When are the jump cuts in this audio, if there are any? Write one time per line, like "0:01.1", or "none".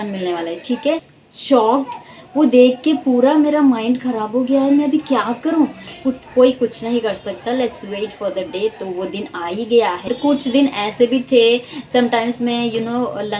0:01.1
0:05.9
0:10.1